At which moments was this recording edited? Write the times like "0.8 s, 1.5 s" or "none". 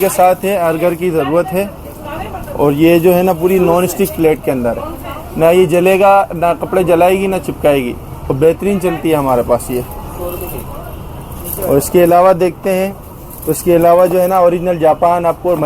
none